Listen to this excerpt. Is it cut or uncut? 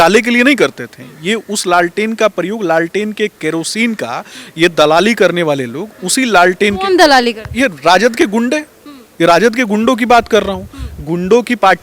uncut